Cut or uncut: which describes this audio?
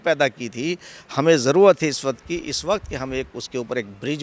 uncut